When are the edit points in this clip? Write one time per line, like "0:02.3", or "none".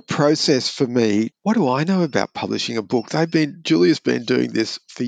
0:01.4